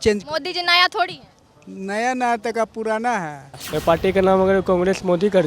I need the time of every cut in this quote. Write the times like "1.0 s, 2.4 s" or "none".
3.7 s